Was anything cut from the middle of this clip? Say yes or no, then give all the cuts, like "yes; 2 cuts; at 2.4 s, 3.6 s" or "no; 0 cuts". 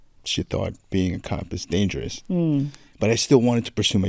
yes; 1 cut; at 2.8 s